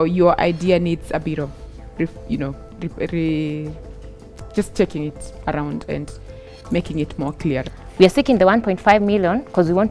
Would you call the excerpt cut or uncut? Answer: cut